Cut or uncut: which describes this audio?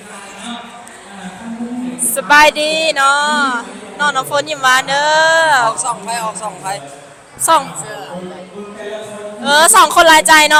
uncut